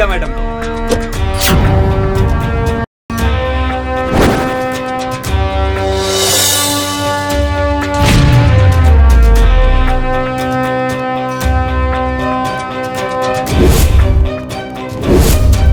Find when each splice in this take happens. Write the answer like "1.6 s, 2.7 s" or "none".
none